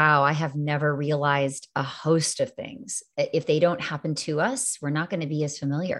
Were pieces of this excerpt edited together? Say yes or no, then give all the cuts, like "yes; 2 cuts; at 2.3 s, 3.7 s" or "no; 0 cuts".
no; 0 cuts